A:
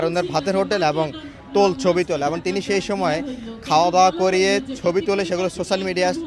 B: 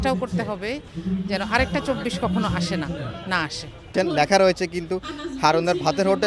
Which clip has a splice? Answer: B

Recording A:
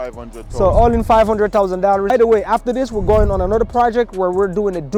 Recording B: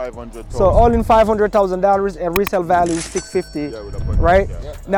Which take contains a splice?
A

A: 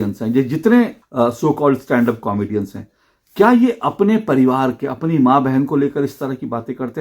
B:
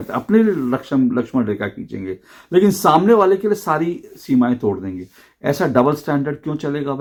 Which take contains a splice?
A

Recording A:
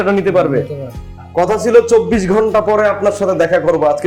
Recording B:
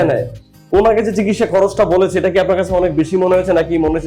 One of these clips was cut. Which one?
A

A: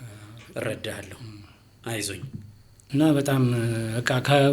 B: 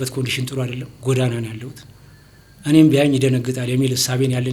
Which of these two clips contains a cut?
A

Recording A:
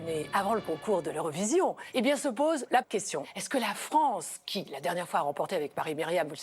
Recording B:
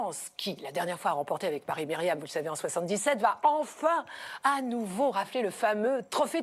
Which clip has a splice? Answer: A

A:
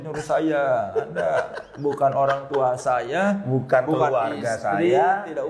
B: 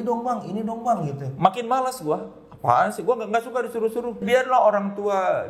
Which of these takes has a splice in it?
B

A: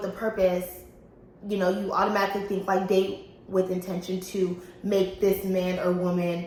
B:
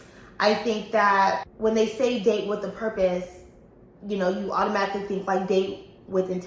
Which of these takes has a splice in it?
B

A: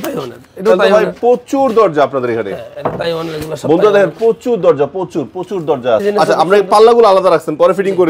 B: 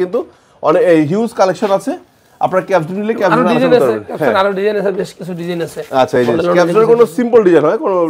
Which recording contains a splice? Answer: A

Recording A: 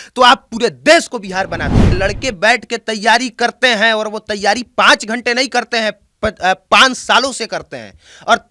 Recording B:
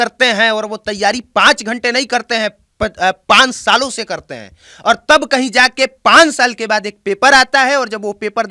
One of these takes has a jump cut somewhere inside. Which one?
A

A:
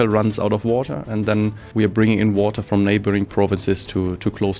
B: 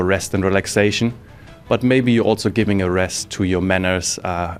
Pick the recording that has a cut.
A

